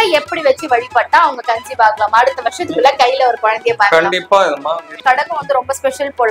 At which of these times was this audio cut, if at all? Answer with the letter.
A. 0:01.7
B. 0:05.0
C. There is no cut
B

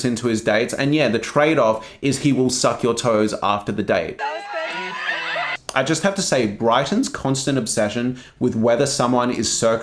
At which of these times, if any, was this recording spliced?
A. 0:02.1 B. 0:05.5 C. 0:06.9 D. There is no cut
B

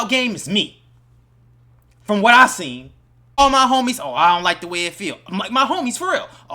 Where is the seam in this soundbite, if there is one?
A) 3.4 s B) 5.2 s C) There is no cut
A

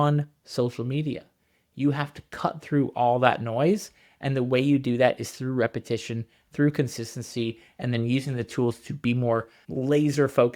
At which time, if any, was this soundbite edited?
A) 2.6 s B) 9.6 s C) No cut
B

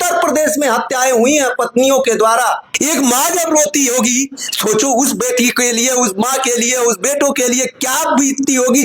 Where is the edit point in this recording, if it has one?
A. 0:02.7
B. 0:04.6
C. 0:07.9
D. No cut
A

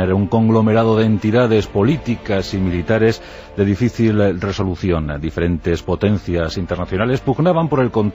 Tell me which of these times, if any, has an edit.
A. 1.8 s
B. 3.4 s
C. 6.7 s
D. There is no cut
D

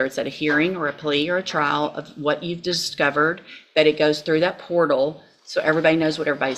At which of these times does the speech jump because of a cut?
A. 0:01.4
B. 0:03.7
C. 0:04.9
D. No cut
D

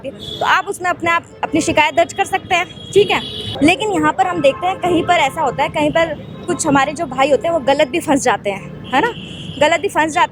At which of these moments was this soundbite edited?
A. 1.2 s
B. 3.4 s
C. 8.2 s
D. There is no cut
B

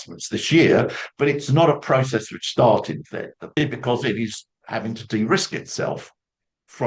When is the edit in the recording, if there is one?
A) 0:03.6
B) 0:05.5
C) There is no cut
A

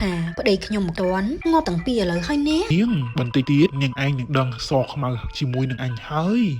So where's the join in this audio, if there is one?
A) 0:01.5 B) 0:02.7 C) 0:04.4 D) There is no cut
B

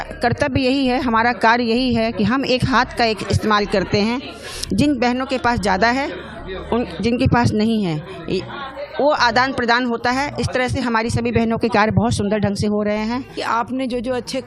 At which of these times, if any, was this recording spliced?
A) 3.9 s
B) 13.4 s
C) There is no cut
B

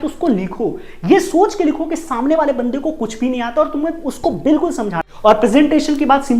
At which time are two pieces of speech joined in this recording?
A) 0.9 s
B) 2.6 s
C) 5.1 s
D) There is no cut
C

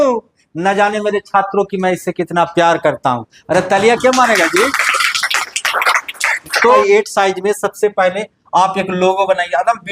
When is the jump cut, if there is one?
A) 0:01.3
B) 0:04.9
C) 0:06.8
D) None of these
C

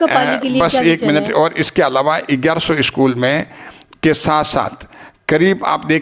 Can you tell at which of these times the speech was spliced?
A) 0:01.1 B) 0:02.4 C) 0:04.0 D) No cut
D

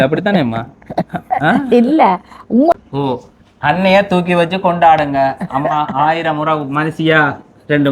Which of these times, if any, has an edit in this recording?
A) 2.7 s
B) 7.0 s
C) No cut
A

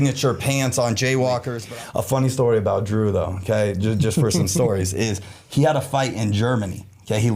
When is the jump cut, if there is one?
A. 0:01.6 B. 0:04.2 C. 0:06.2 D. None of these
A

